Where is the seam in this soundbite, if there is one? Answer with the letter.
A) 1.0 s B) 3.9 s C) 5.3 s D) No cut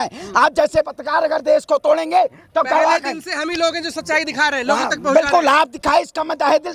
D